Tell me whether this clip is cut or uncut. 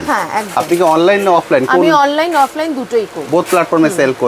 uncut